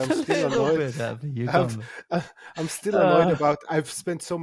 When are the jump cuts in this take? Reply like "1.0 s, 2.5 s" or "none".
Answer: none

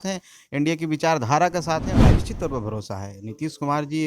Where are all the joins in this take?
1.9 s

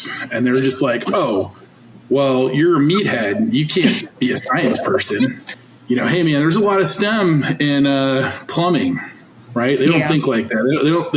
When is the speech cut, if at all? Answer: 5.5 s

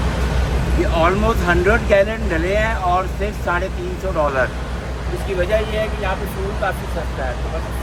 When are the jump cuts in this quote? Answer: none

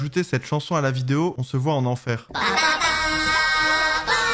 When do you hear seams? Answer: none

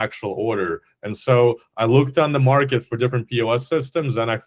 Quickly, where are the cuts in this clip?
none

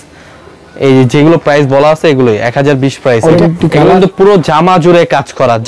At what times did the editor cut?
3.4 s

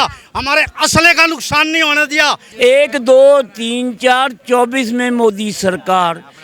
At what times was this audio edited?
2.4 s

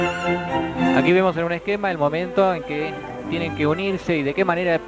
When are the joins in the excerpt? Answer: 3.1 s

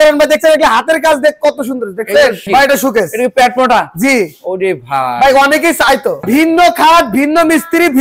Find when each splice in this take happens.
2.4 s, 6.2 s

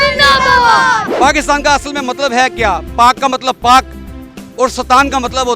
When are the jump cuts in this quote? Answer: 1.1 s

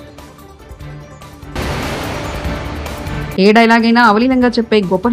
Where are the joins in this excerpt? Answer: 1.4 s, 3.1 s

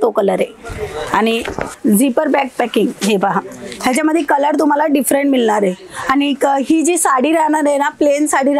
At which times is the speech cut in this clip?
1.7 s

